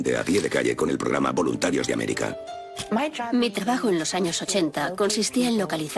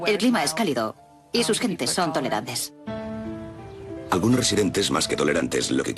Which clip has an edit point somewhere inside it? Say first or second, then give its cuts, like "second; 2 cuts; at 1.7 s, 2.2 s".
second; 1 cut; at 3.0 s